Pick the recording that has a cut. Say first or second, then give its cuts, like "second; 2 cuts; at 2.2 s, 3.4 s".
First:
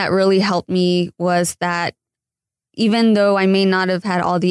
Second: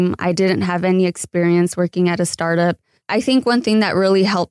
second; 1 cut; at 2.9 s